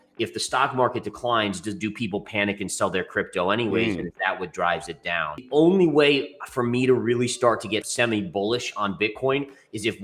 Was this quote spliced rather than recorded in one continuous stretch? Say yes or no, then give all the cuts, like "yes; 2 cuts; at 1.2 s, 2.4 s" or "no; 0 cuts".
yes; 1 cut; at 5.4 s